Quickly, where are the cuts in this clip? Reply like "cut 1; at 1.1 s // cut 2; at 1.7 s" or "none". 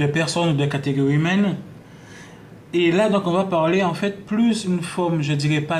cut 1; at 4.3 s